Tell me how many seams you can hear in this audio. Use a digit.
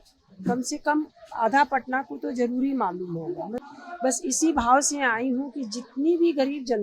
1